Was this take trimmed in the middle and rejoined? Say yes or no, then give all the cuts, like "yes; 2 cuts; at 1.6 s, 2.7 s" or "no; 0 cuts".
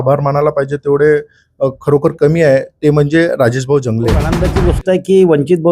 yes; 1 cut; at 4.4 s